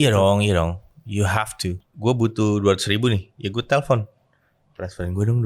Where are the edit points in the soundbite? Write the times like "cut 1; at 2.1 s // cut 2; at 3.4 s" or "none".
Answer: cut 1; at 1.9 s